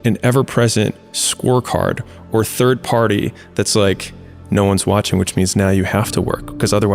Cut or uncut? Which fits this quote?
uncut